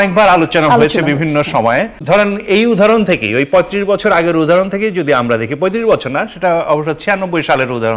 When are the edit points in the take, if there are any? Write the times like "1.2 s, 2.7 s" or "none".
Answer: 1.9 s